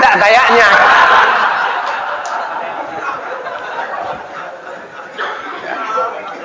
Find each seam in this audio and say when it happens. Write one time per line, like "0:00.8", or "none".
none